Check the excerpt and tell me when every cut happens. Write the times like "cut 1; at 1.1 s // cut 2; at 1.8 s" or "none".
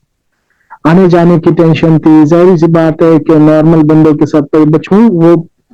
cut 1; at 4.8 s